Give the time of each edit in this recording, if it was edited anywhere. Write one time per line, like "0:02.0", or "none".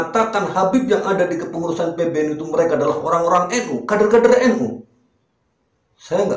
none